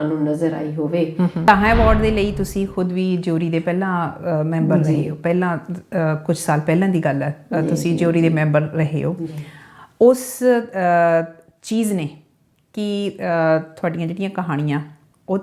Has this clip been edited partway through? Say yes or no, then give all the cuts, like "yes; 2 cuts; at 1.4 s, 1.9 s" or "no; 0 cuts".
yes; 1 cut; at 1.5 s